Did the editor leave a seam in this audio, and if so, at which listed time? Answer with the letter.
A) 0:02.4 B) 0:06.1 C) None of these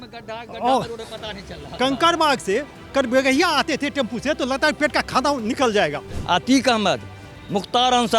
B